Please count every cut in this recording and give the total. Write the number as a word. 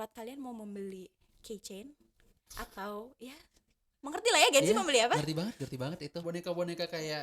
one